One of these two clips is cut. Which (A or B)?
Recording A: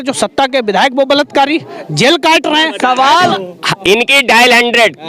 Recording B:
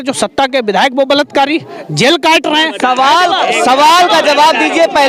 A